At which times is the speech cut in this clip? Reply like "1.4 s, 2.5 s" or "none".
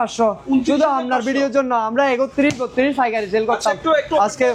none